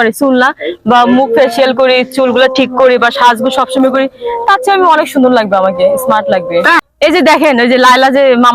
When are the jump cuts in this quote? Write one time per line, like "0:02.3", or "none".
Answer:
0:06.8